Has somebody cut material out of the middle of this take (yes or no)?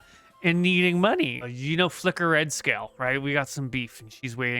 yes